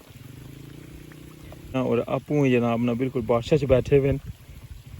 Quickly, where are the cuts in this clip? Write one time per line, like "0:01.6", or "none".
0:01.8